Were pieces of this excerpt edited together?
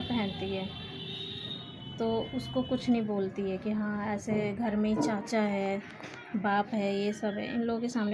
no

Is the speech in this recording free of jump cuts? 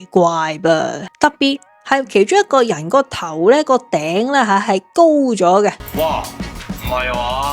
no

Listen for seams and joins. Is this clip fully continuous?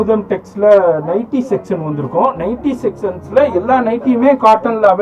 yes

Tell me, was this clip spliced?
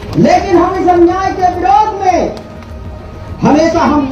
no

